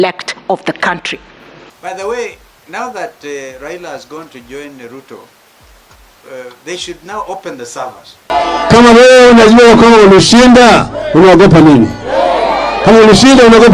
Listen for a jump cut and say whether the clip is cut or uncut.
cut